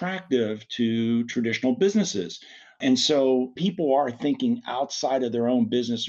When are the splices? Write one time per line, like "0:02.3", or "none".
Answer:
0:03.6